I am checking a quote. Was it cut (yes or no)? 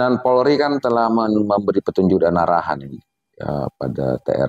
no